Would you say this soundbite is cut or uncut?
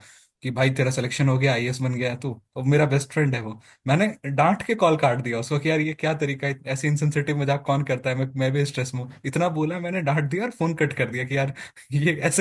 uncut